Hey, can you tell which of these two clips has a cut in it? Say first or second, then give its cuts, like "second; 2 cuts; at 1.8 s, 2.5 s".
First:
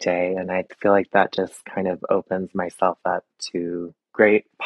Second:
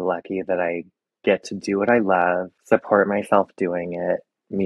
second; 1 cut; at 2.5 s